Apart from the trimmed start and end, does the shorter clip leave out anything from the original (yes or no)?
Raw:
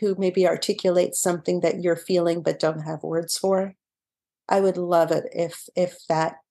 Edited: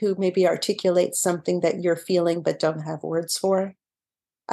no